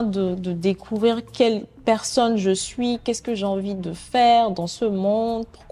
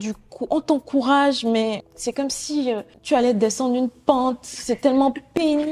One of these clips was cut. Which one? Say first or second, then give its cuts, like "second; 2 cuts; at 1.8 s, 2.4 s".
second; 2 cuts; at 1.9 s, 2.9 s